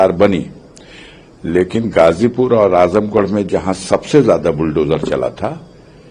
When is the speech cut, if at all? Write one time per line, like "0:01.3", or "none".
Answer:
none